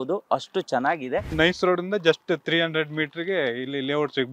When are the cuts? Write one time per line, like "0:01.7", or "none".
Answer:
0:01.3